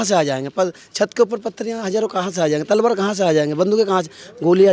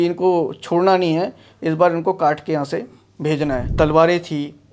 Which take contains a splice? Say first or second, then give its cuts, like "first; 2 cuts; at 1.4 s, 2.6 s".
second; 1 cut; at 3.7 s